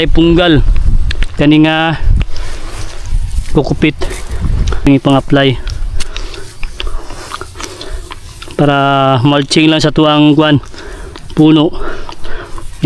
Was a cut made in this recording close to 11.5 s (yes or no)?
no